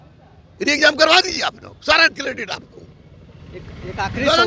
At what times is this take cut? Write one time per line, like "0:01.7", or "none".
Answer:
none

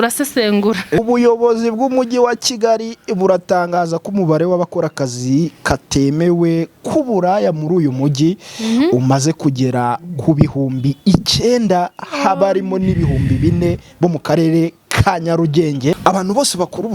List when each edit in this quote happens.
0:01.0
0:16.0

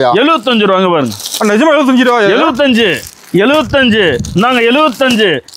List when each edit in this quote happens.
none

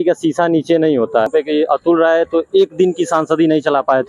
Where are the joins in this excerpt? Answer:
0:01.3

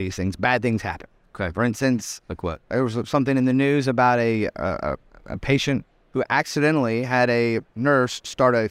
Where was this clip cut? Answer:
none

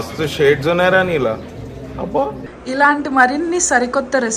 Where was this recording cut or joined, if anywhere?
0:02.4

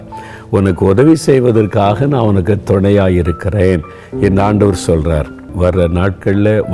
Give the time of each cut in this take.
0:05.5

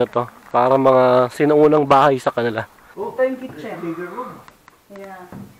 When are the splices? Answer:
0:02.8

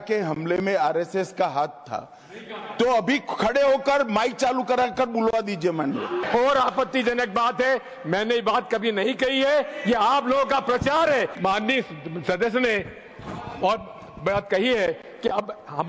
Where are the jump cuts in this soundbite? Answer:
0:06.2
0:11.3

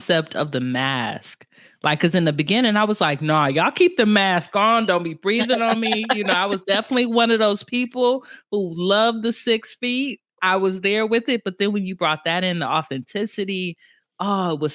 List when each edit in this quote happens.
none

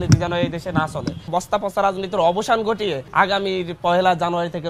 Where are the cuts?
0:01.2

